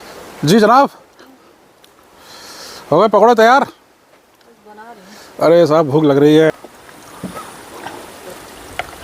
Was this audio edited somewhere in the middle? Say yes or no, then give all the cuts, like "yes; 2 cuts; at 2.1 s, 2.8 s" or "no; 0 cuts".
yes; 1 cut; at 6.5 s